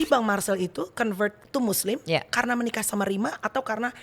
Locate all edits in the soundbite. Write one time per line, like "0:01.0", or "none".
0:01.4